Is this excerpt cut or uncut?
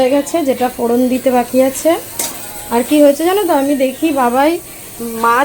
uncut